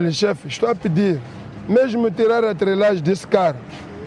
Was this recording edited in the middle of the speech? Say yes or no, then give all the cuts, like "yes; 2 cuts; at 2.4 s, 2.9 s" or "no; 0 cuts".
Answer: no; 0 cuts